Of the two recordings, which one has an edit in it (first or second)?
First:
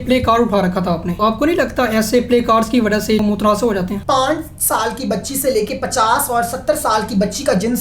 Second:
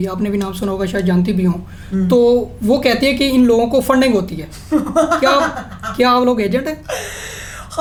first